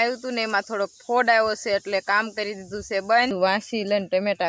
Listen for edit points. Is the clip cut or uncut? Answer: cut